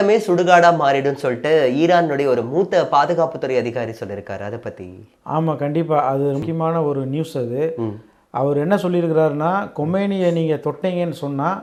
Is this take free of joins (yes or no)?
yes